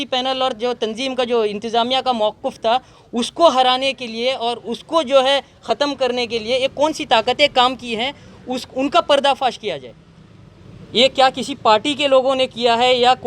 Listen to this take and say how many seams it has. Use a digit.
0